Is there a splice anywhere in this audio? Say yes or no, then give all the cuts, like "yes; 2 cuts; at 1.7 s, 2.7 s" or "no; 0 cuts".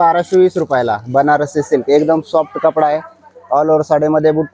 no; 0 cuts